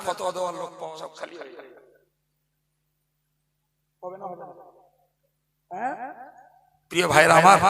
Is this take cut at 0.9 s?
yes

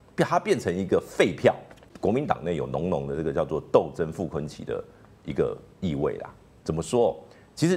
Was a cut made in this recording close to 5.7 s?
no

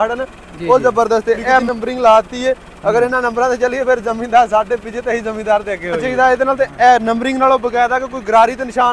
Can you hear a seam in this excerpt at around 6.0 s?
yes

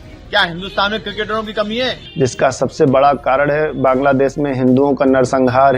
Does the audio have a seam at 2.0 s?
yes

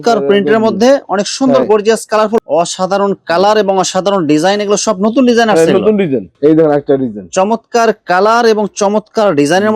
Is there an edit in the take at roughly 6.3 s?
yes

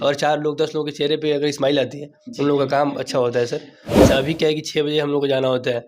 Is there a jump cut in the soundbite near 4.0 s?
yes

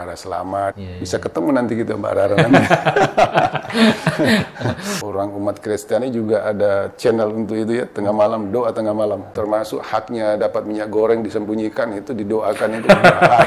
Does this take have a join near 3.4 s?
no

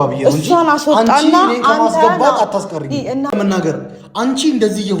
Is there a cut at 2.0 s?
no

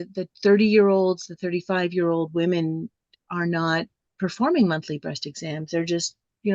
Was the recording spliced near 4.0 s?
yes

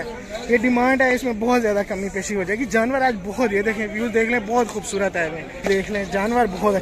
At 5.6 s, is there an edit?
yes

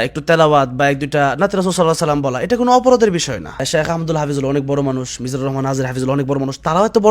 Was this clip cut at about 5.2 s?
no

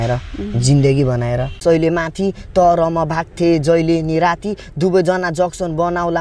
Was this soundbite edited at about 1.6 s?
yes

